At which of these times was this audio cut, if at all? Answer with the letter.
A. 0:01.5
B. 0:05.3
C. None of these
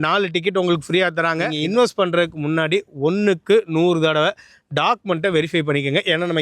A